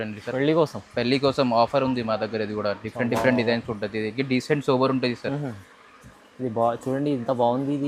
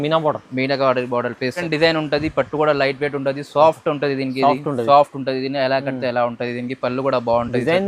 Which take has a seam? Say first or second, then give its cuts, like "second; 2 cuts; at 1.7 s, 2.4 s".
second; 1 cut; at 1.6 s